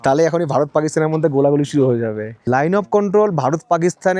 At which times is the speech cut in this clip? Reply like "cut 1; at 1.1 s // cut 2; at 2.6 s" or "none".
cut 1; at 2.3 s